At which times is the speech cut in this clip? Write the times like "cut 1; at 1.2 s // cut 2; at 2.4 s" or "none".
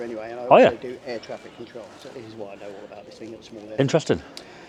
none